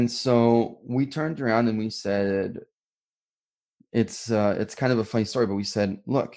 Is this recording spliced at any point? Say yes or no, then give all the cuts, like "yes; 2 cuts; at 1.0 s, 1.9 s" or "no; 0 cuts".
yes; 1 cut; at 3.1 s